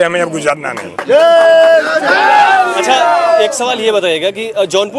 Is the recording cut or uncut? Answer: uncut